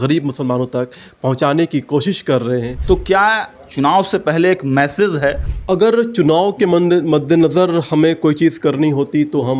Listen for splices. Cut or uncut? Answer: cut